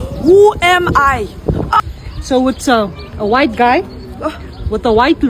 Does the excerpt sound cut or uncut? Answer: cut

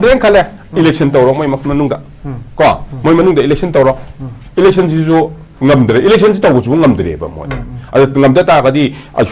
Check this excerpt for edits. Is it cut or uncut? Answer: uncut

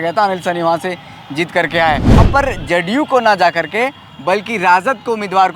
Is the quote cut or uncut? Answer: cut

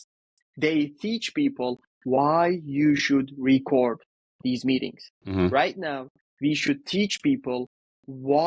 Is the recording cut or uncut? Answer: uncut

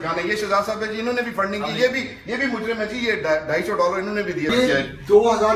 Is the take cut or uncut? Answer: uncut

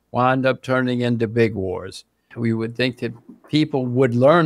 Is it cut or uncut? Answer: cut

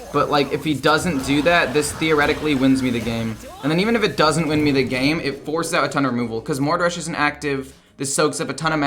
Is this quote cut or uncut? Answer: uncut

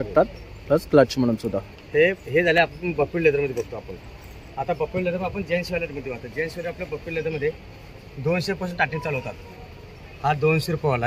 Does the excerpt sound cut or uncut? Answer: uncut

